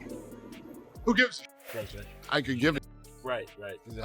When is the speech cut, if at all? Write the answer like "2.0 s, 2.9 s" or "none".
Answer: 1.6 s